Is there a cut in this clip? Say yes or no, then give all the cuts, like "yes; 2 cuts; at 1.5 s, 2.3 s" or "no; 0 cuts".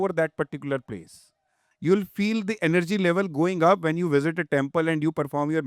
yes; 1 cut; at 1.6 s